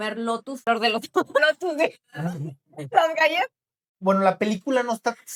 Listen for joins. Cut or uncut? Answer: uncut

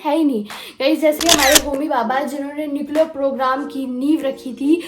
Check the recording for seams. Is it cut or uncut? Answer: cut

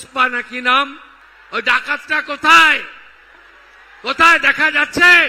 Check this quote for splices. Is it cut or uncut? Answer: uncut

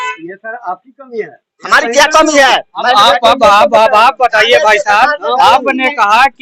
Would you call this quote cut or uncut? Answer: uncut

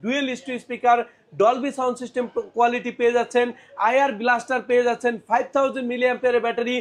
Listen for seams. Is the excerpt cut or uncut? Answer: uncut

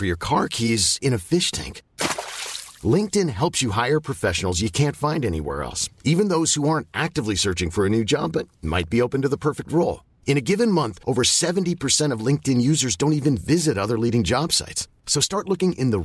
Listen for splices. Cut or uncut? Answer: uncut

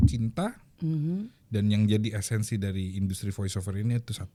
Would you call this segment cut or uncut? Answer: uncut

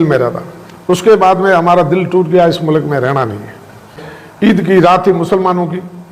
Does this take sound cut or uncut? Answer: cut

